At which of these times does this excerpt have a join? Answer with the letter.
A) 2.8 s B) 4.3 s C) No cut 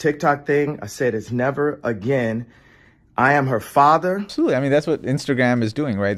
B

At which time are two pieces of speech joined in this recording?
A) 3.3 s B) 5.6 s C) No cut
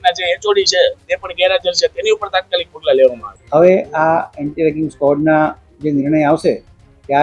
A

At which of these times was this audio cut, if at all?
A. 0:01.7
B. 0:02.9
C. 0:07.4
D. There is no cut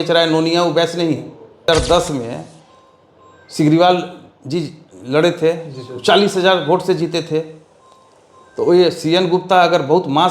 A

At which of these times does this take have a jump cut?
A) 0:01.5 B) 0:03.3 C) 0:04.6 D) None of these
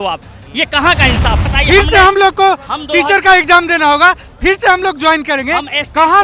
A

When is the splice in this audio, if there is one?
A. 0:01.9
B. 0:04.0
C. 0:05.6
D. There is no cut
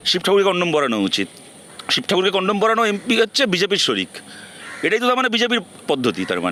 D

